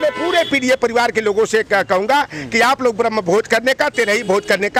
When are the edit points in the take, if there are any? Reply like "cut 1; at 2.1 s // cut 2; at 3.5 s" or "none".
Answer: none